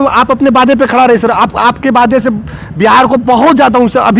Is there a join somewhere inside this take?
no; 0 cuts

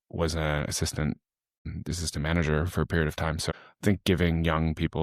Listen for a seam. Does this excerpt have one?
yes; 2 cuts; at 1.7 s, 3.4 s

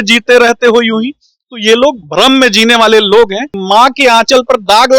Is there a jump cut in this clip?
yes; 1 cut; at 3.5 s

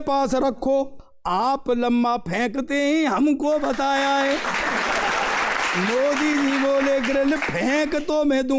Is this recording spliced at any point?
yes; 2 cuts; at 1.1 s, 5.6 s

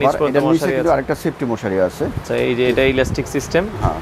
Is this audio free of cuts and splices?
no; 1 cut; at 2.3 s

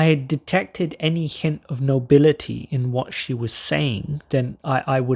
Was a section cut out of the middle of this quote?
yes; 1 cut; at 4.3 s

